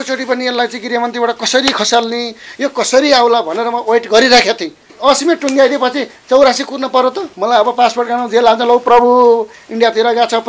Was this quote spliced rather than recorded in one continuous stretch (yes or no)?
yes